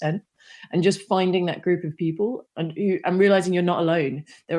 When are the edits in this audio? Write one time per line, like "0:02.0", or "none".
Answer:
0:02.4